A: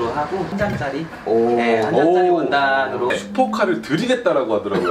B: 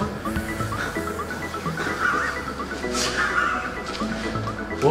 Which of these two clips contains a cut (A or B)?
A